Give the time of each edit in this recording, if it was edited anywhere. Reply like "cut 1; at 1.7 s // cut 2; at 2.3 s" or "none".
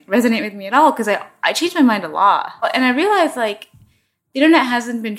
cut 1; at 2.7 s